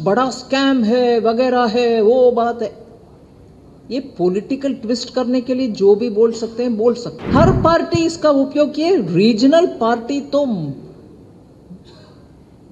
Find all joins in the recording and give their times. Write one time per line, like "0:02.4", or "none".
0:07.1